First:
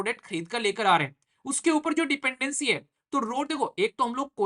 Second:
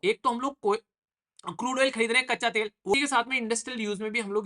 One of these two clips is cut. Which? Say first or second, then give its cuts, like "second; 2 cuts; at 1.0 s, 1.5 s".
second; 1 cut; at 2.9 s